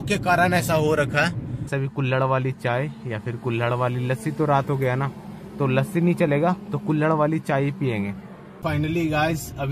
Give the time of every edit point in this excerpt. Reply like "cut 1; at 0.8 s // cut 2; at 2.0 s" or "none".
cut 1; at 1.7 s // cut 2; at 8.6 s